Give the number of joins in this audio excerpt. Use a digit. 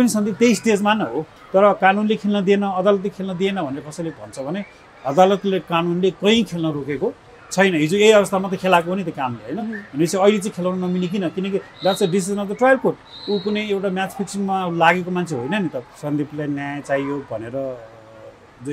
2